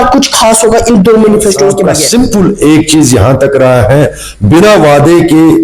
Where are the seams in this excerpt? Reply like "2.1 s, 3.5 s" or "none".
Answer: 1.9 s